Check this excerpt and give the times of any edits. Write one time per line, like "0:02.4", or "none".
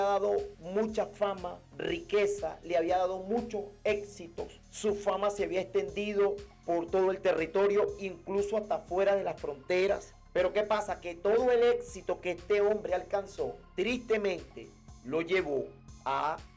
0:10.2
0:13.6